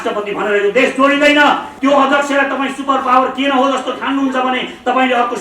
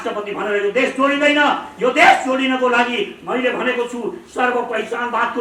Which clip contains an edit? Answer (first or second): first